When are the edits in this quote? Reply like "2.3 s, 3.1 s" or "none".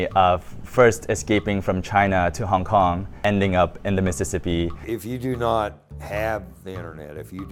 3.2 s, 4.8 s